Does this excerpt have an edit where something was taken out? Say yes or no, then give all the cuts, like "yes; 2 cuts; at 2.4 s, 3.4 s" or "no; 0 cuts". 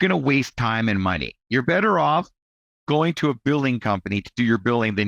yes; 1 cut; at 1.3 s